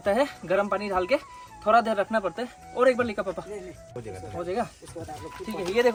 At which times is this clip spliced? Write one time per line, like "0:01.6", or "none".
none